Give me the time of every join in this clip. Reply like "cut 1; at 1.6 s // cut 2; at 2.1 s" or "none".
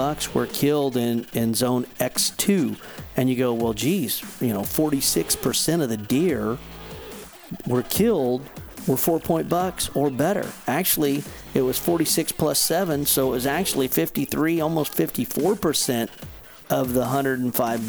none